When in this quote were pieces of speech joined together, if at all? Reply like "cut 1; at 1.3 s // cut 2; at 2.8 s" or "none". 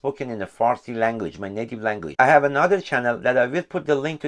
cut 1; at 2.0 s